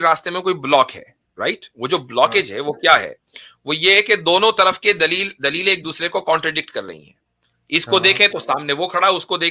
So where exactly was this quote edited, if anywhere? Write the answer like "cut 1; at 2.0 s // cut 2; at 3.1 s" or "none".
none